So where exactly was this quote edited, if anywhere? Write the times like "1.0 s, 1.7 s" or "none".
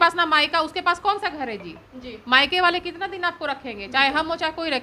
none